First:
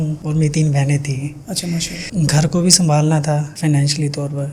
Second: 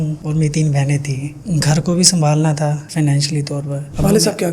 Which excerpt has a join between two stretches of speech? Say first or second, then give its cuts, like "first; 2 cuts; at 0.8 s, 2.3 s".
second; 1 cut; at 1.3 s